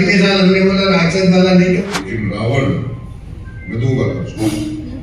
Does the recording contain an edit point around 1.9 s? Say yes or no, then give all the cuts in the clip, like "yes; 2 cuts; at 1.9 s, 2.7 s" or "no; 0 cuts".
yes; 1 cut; at 1.9 s